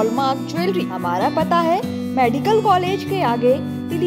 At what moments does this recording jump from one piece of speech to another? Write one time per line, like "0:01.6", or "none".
0:00.9

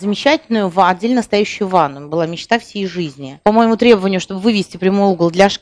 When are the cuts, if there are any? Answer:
0:03.3

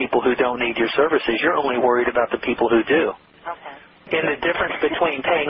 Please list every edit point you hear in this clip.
0:04.1

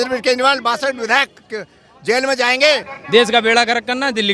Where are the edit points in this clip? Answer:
0:02.9

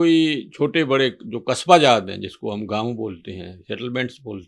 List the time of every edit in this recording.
none

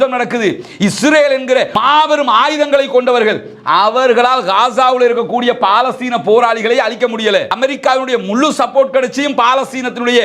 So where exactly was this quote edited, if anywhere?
0:01.7
0:07.6

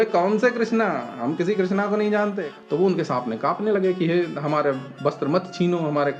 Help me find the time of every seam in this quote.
0:02.4

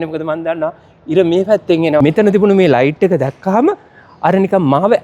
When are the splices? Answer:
0:02.0

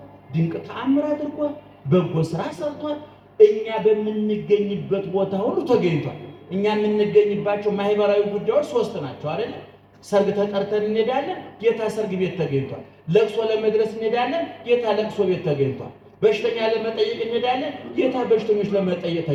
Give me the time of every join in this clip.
none

